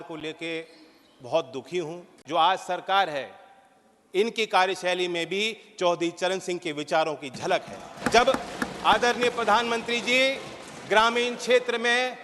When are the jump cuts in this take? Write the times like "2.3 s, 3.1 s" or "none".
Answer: 2.1 s, 7.9 s

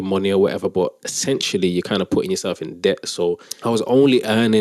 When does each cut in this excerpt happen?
3.5 s

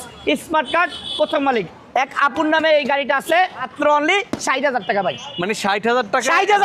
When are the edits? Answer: 3.6 s

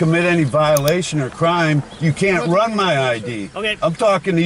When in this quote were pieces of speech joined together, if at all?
none

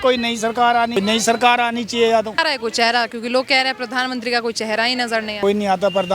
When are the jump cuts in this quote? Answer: 1.0 s, 2.4 s, 5.4 s

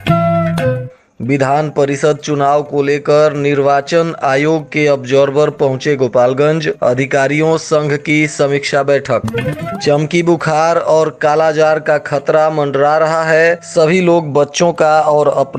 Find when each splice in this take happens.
0.9 s

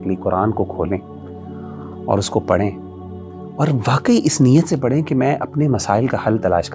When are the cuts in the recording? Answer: none

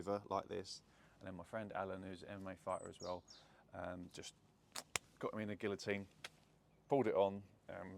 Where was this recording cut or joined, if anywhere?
none

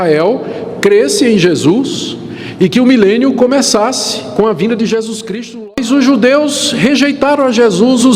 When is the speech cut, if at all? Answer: 5.6 s

